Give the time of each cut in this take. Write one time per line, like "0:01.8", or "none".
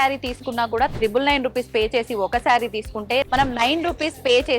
0:03.3